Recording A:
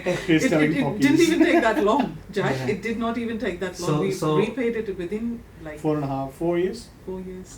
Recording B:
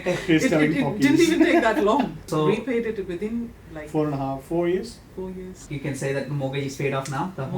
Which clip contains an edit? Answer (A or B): B